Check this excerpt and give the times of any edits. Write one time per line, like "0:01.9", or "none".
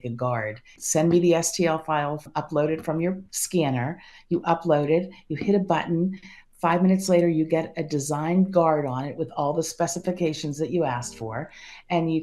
0:02.3
0:03.3